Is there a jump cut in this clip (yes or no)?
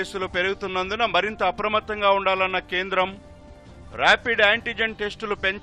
no